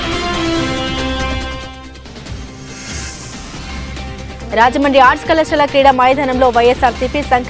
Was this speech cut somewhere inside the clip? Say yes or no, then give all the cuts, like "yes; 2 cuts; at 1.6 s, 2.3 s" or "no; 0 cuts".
yes; 1 cut; at 1.0 s